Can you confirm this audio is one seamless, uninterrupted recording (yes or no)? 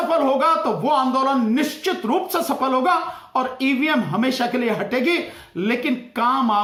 yes